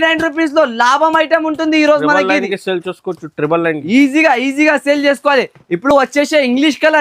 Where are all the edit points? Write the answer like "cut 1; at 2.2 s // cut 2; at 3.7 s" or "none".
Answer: none